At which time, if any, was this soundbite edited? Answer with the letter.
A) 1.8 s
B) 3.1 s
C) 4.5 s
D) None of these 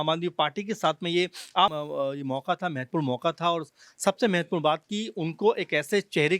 A